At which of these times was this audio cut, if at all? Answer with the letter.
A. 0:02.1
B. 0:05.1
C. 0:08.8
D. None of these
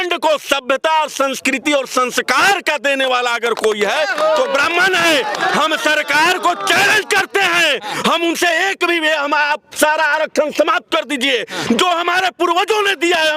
D